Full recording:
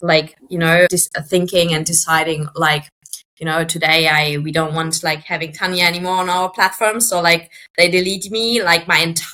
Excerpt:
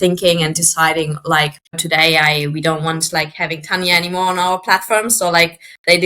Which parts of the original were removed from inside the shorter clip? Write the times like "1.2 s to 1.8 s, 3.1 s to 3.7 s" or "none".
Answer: 3.1 s to 3.7 s